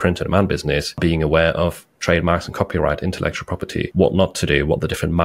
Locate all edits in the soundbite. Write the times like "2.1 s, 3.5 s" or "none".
none